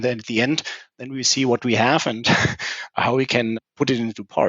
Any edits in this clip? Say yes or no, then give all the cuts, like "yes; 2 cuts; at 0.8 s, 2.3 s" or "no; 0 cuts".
yes; 1 cut; at 3.6 s